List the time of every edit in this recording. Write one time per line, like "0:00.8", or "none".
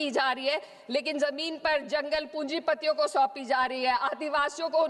none